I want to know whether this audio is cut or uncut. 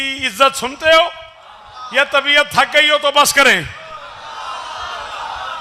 uncut